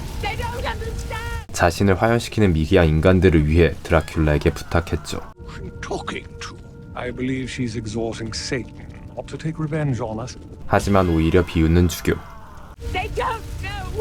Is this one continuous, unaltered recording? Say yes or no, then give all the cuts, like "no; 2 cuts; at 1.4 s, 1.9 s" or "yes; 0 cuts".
no; 1 cut; at 12.7 s